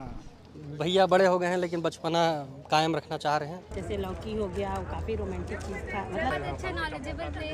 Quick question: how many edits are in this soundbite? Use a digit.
2